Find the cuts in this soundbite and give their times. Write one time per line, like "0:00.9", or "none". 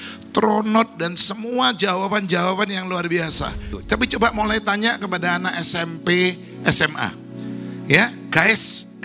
0:03.8